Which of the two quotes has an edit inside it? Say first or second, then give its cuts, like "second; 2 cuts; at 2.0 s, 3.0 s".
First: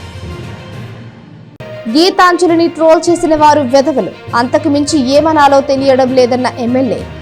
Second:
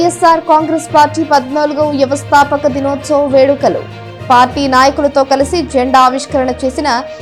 first; 1 cut; at 1.4 s